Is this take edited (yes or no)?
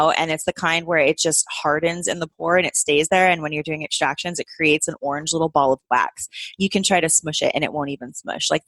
no